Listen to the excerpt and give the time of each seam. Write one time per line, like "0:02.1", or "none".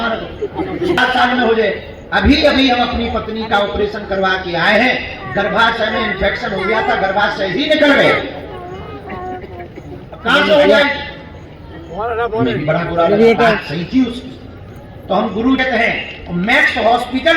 0:01.0
0:15.6